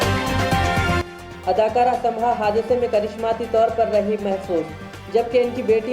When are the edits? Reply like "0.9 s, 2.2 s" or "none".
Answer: none